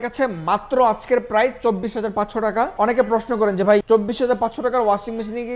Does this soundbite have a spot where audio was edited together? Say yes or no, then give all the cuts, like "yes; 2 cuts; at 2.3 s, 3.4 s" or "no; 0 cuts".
yes; 2 cuts; at 2.7 s, 3.8 s